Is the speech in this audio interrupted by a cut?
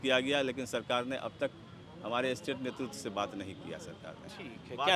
no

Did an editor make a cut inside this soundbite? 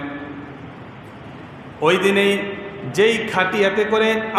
no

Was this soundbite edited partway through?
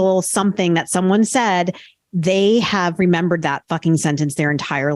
no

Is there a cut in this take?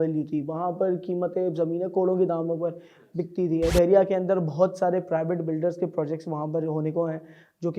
yes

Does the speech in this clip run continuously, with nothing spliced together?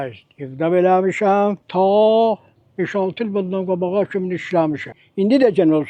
no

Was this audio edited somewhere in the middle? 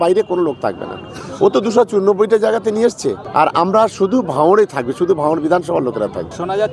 no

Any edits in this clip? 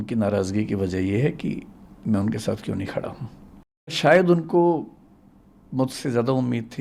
yes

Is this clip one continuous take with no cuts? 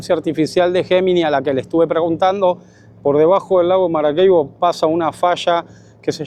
yes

